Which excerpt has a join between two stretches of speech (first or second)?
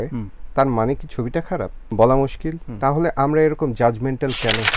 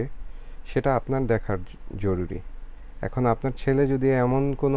first